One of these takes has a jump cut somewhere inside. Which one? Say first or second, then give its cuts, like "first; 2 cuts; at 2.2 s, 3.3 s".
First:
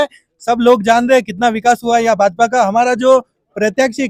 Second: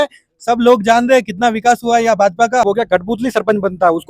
second; 1 cut; at 2.6 s